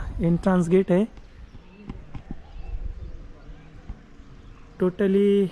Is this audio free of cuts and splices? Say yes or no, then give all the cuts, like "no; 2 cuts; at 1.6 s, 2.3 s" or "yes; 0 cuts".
yes; 0 cuts